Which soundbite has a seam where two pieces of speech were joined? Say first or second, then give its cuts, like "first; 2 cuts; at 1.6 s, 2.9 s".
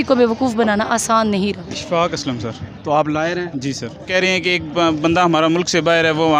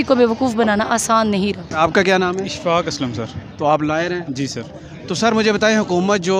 first; 2 cuts; at 1.7 s, 4.1 s